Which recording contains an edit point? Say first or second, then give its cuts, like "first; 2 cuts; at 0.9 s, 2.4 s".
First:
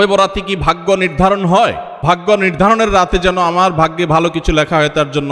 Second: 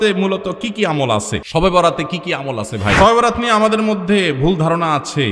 second; 2 cuts; at 1.4 s, 2.9 s